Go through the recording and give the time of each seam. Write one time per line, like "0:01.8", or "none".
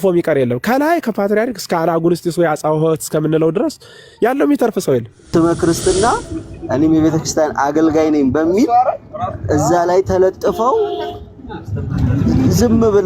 0:05.3